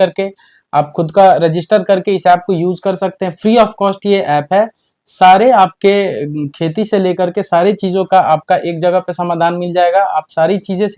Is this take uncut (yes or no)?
yes